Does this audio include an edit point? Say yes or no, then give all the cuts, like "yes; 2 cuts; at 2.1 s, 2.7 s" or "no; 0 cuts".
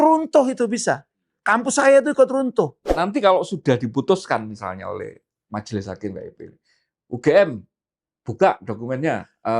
yes; 1 cut; at 2.8 s